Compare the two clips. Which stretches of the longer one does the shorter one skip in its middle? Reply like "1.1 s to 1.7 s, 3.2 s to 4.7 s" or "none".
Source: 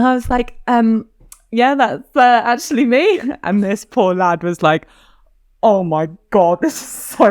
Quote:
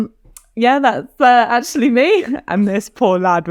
none

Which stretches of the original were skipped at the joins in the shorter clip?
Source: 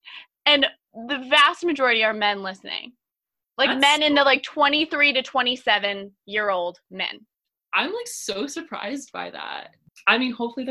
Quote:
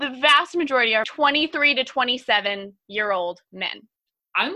2.2 s to 4.5 s

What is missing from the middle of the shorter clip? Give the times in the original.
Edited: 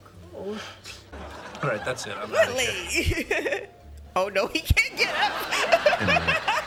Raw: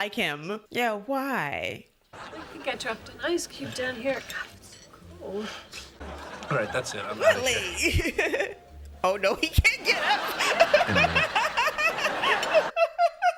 none

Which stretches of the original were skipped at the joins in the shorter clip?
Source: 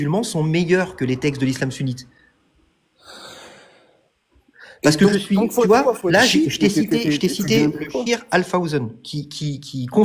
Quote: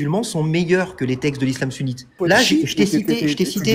2.2 s to 6.0 s

